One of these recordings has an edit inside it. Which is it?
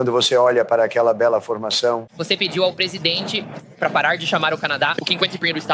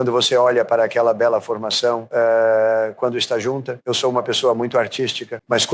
first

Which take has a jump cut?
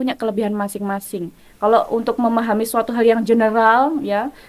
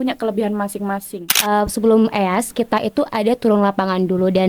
second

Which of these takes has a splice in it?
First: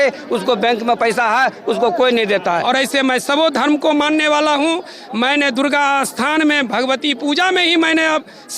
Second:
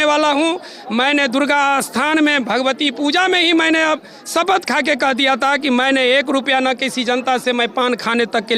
first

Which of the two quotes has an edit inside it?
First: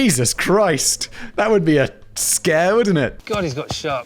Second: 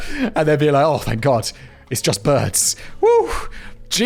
first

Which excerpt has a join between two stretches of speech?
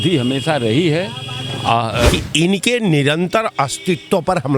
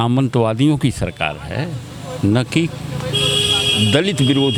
first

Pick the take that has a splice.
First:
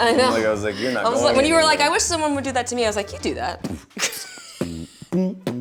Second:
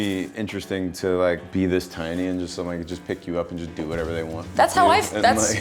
second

